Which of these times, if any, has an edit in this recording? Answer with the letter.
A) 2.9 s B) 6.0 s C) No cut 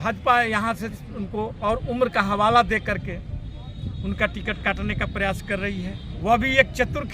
B